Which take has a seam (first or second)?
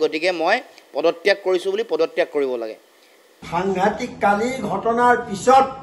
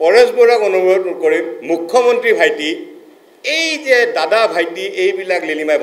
first